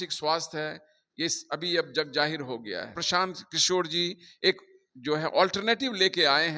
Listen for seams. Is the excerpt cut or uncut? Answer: cut